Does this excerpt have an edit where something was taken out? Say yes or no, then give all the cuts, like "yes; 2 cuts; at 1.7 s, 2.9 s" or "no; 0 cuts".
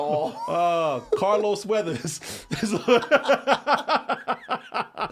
no; 0 cuts